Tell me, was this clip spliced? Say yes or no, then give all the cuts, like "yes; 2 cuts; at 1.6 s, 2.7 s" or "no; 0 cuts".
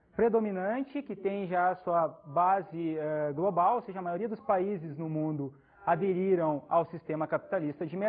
no; 0 cuts